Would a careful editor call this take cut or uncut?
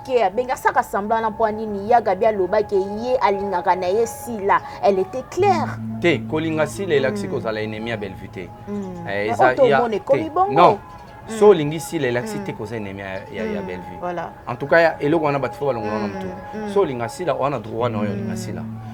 uncut